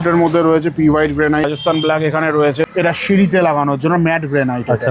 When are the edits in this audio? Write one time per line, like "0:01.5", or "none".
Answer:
0:01.5
0:02.7